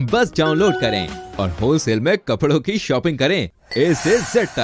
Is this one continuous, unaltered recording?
yes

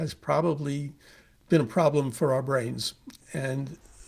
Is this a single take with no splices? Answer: no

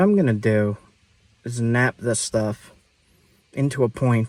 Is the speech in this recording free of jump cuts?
yes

